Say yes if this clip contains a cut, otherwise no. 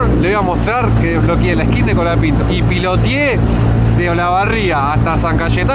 yes